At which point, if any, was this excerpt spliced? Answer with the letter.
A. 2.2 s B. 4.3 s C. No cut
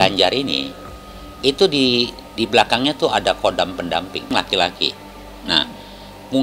B